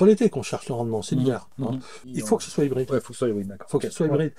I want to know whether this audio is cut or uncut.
cut